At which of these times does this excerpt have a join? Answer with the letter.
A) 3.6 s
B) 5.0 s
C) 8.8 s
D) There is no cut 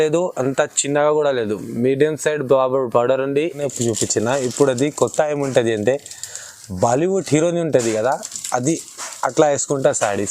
A